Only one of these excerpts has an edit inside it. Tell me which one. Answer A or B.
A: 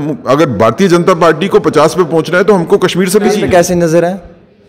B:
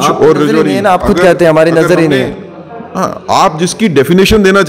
A